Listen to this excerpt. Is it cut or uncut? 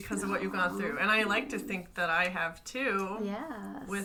uncut